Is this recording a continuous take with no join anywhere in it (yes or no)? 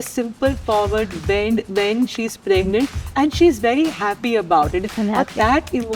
no